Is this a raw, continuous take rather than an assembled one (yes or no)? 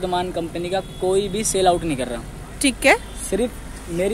yes